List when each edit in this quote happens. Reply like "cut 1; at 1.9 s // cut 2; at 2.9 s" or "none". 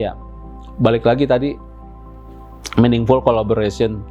none